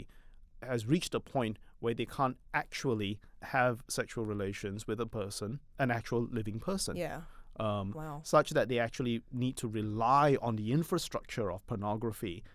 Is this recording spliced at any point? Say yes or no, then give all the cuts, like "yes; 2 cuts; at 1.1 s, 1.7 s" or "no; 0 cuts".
yes; 2 cuts; at 3.3 s, 5.7 s